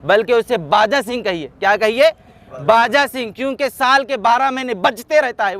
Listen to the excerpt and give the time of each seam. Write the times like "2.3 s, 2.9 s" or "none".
none